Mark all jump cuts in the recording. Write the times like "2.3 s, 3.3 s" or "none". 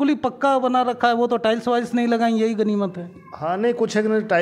none